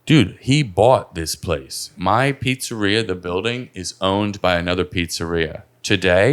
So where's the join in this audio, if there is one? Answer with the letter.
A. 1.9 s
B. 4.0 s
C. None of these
A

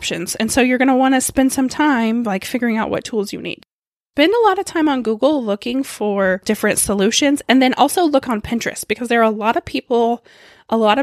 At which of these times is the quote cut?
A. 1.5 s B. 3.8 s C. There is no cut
B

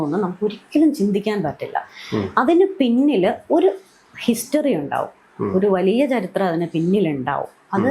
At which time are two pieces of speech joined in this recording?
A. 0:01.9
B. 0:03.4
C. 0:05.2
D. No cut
D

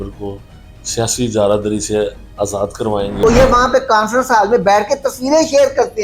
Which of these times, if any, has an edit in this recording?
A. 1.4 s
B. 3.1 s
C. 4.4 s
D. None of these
B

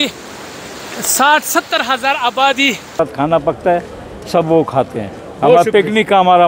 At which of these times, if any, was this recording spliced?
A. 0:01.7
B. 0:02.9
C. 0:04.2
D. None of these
B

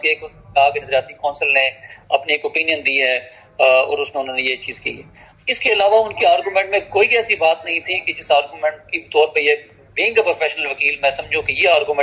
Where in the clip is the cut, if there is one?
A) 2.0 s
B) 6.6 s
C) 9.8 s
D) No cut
D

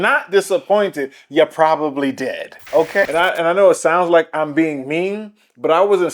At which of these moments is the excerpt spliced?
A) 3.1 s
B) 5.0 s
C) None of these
A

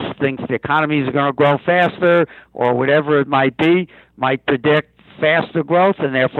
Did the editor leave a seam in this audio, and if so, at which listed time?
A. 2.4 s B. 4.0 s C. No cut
C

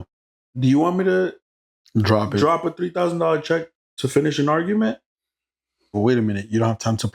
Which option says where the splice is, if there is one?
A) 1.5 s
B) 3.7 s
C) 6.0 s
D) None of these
C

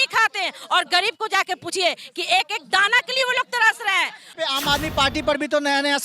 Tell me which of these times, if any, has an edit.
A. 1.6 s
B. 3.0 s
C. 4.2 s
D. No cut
C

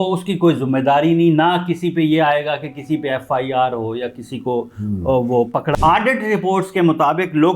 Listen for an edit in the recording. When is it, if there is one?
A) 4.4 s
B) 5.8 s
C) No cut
B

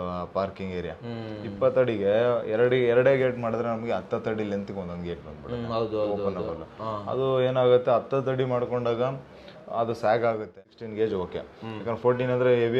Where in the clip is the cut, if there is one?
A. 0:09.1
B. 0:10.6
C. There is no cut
B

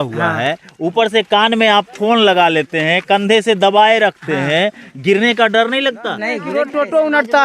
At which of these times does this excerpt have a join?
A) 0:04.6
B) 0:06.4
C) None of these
B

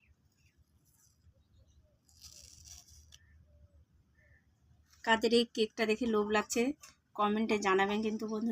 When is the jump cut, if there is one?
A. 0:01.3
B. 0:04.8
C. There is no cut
B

